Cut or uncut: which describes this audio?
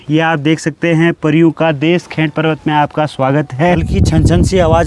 cut